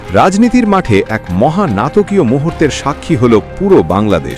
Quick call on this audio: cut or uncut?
uncut